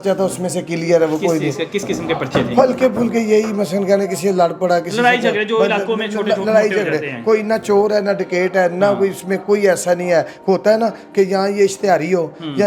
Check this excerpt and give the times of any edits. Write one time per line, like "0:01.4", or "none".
none